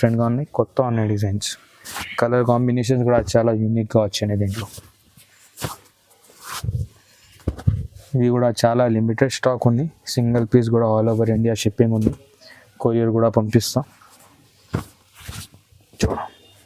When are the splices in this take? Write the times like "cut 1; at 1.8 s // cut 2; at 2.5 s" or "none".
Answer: none